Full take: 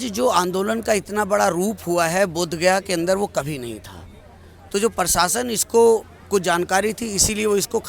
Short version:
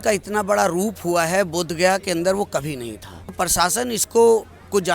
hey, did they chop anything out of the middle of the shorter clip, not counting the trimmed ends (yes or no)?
yes